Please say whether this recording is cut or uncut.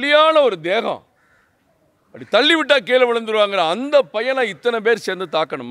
uncut